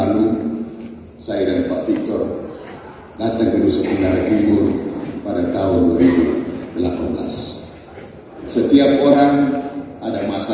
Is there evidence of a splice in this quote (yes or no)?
no